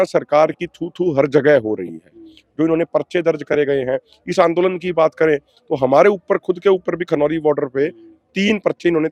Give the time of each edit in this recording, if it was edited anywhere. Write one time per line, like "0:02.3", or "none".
none